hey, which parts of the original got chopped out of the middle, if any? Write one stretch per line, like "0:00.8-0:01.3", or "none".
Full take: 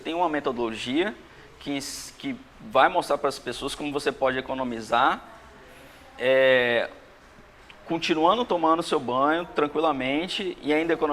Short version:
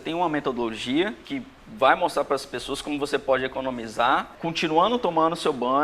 0:01.2-0:02.1
0:05.2-0:07.8